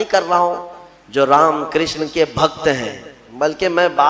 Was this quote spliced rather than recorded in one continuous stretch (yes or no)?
no